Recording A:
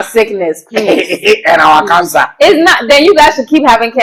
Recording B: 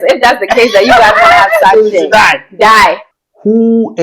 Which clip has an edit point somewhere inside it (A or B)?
B